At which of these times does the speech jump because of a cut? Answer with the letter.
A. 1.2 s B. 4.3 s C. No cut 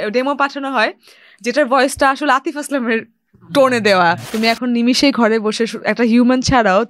B